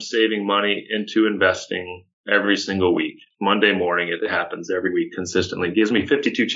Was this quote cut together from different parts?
no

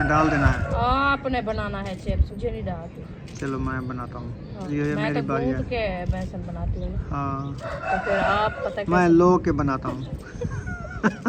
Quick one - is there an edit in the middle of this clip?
yes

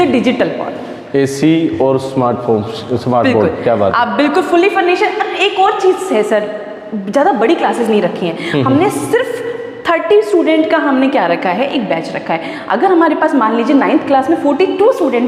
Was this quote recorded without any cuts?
yes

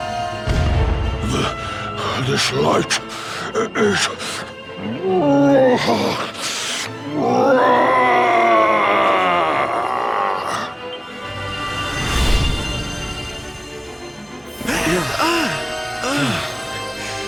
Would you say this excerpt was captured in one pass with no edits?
yes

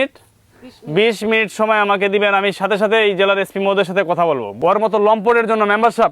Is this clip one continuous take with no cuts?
no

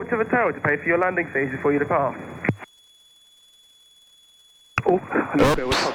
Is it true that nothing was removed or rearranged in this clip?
yes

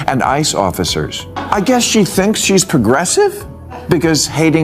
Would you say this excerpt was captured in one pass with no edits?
no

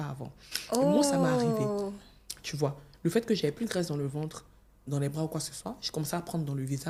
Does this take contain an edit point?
no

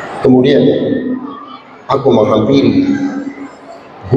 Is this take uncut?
yes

